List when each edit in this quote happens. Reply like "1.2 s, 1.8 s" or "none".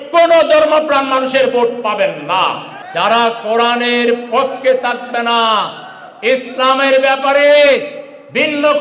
2.7 s